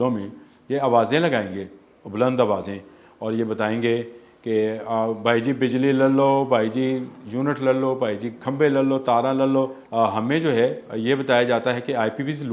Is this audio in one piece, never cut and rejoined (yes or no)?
no